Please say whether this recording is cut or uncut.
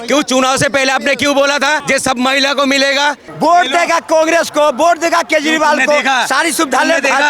cut